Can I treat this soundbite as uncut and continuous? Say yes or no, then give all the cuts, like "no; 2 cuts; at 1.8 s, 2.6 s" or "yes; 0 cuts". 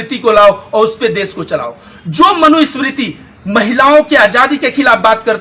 yes; 0 cuts